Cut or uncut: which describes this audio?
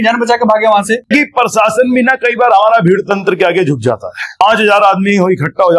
cut